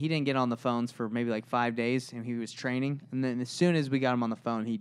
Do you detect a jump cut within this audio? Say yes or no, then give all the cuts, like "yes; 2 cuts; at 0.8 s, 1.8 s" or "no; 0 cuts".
no; 0 cuts